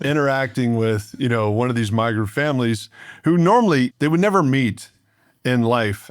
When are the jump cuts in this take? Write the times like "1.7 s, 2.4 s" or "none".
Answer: 3.9 s